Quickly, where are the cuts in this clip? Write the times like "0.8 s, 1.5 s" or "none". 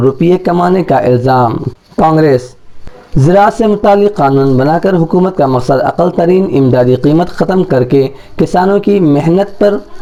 none